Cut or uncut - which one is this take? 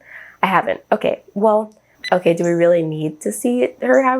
cut